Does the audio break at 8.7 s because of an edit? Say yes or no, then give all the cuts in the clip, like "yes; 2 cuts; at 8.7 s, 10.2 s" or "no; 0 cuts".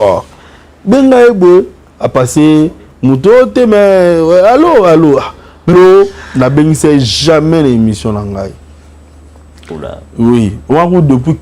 no; 1 cut; at 5.7 s